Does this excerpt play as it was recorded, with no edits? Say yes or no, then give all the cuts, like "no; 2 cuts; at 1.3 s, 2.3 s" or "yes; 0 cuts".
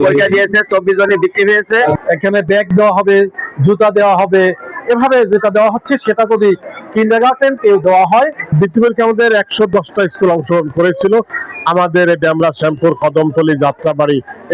no; 2 cuts; at 1.9 s, 8.4 s